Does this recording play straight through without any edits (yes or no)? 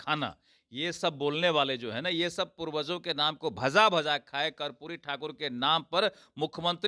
yes